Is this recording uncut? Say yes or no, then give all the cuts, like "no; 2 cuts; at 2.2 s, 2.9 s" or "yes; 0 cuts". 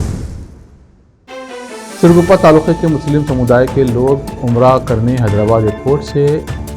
no; 1 cut; at 1.3 s